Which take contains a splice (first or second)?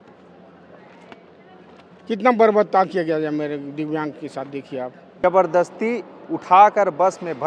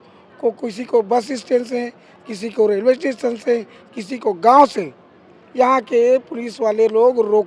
first